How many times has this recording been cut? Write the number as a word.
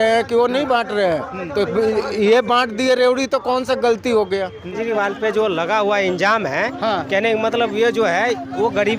one